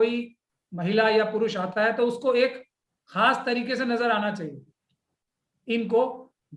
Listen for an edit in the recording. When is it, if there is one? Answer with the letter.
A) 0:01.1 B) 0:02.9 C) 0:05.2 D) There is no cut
C